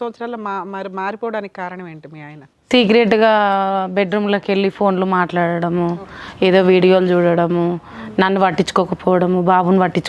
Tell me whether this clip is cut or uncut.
uncut